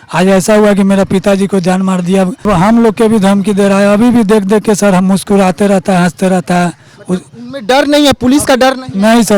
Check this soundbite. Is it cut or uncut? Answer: cut